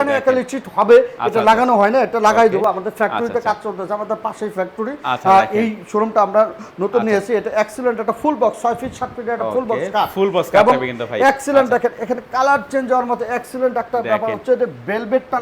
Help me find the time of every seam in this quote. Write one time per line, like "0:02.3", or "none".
none